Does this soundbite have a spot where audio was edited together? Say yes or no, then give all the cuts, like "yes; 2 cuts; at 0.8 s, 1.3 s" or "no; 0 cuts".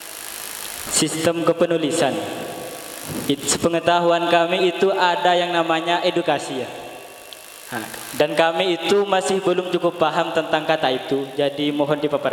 no; 0 cuts